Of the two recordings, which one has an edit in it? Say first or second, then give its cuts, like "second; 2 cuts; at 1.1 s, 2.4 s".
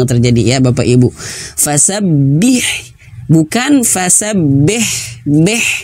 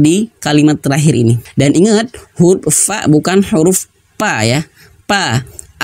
second; 1 cut; at 1.4 s